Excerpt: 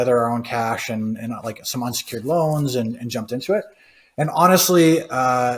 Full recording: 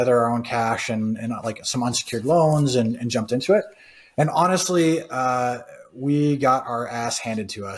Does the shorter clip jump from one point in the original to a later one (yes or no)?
no